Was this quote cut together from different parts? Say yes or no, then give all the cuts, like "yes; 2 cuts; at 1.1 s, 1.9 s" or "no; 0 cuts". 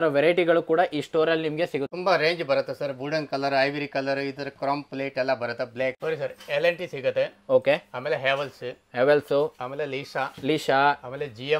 yes; 2 cuts; at 1.9 s, 6.0 s